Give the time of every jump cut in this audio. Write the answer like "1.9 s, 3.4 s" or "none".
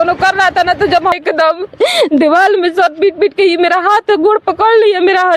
1.1 s